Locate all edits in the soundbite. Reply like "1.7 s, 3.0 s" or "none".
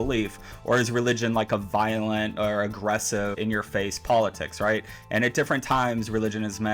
3.4 s